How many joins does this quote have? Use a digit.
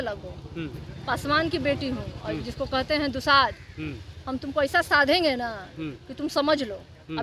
0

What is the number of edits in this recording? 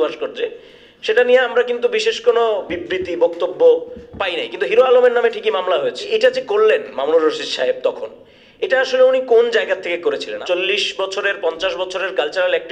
3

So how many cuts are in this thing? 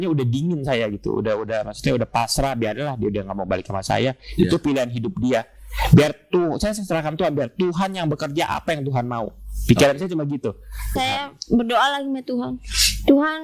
1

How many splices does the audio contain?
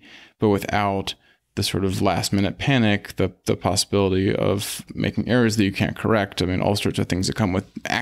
1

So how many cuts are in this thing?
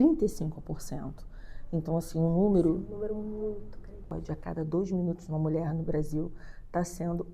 1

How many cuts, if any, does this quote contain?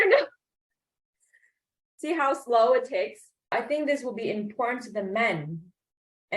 1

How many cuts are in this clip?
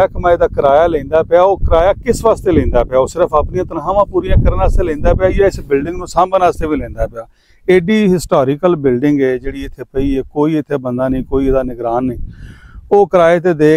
0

